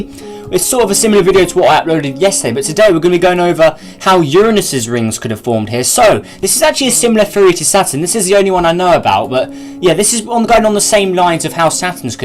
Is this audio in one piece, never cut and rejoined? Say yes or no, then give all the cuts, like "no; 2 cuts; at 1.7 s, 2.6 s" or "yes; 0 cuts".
yes; 0 cuts